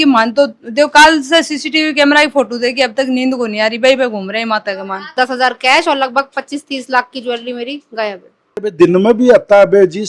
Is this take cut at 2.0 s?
no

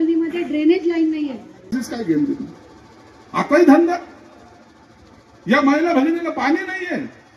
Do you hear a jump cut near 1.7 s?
yes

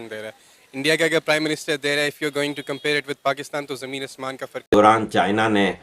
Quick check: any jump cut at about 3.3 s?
no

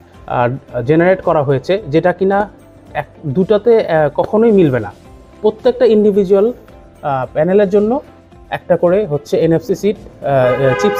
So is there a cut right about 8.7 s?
no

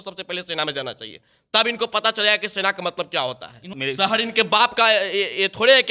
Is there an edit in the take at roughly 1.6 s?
no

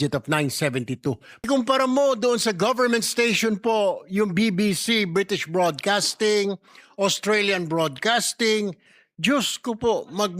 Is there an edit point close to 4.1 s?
no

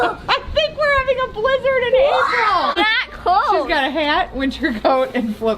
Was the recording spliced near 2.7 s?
yes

